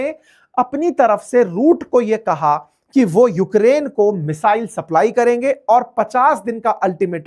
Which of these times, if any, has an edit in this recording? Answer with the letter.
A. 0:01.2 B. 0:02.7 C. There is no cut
C